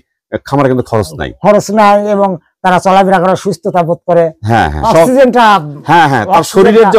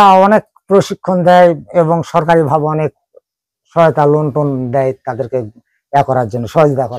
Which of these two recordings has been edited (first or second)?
first